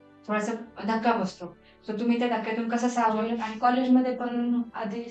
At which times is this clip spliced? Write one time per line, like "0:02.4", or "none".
0:03.4

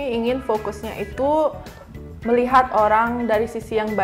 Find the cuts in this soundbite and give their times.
none

